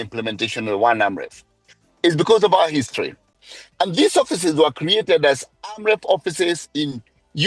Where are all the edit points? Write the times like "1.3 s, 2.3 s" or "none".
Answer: 3.2 s